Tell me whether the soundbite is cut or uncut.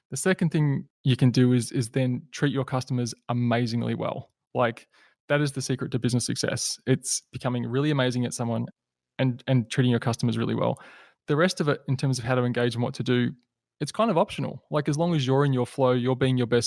cut